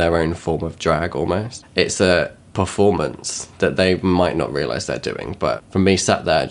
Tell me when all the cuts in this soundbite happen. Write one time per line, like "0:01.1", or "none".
0:01.6
0:02.4
0:05.6